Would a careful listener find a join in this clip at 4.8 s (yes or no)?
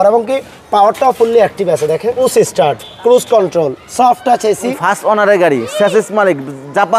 yes